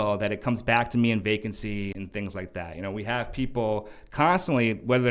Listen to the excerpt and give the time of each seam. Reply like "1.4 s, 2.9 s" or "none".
1.9 s